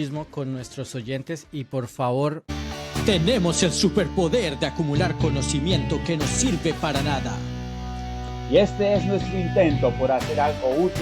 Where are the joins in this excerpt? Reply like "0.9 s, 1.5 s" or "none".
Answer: 2.4 s